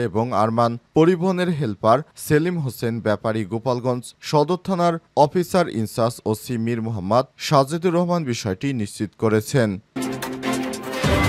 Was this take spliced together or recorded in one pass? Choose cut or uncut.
cut